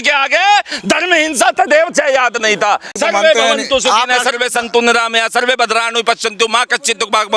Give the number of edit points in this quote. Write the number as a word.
one